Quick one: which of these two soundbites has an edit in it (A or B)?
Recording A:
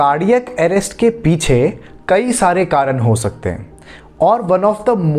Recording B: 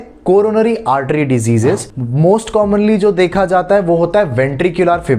B